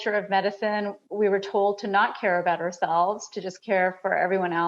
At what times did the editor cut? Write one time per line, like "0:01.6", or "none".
0:01.0